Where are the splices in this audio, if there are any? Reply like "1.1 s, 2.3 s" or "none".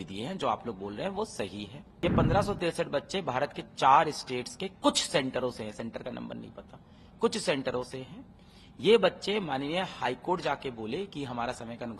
1.8 s